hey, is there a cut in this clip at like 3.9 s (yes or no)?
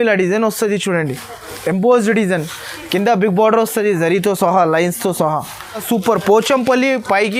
no